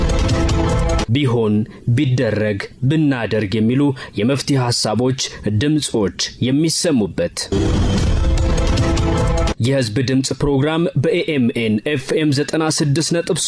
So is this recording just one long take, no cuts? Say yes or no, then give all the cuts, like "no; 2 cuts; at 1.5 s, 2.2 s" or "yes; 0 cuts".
yes; 0 cuts